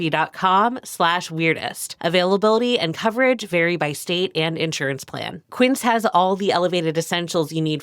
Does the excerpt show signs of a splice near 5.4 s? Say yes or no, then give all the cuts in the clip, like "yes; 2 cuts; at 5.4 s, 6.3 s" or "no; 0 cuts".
yes; 1 cut; at 5.4 s